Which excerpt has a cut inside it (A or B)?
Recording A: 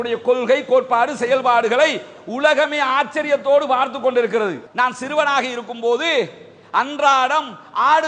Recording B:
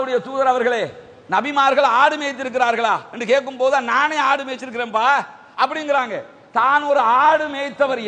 A